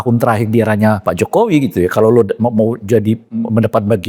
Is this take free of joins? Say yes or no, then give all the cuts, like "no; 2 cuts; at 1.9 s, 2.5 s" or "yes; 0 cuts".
no; 1 cut; at 1.0 s